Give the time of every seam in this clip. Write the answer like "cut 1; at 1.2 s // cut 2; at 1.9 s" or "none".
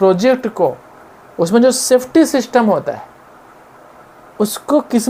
none